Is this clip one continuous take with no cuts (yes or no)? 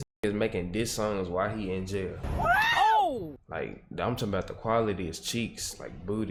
yes